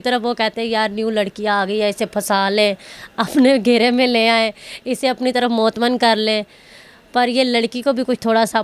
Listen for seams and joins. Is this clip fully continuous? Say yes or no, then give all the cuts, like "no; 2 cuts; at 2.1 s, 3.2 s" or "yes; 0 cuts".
yes; 0 cuts